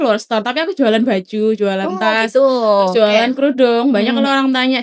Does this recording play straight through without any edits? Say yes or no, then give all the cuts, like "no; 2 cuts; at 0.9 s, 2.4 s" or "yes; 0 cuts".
yes; 0 cuts